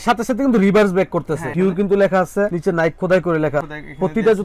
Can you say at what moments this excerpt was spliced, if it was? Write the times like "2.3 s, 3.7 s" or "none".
1.5 s